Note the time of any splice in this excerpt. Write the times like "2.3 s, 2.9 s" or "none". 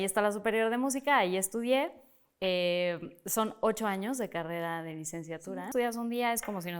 5.4 s

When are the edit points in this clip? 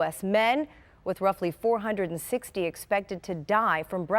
0.9 s

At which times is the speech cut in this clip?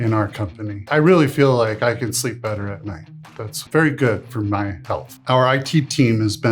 0.9 s, 3.6 s, 5.1 s

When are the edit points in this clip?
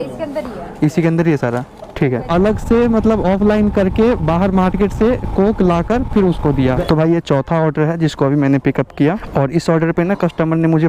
2.3 s, 6.8 s

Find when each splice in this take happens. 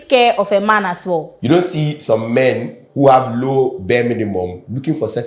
1.3 s

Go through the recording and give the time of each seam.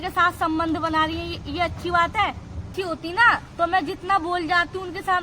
2.7 s

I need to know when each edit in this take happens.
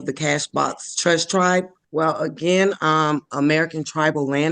1.8 s

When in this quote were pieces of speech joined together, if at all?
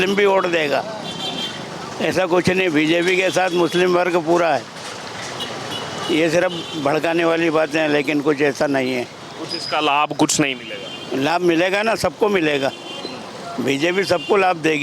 none

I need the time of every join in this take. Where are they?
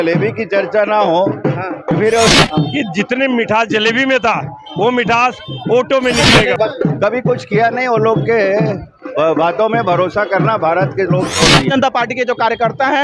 2.4 s, 6.6 s, 11.7 s

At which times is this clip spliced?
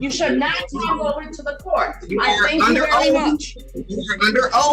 none

